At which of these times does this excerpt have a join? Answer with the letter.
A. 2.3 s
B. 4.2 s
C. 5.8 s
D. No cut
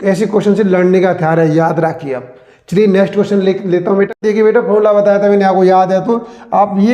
B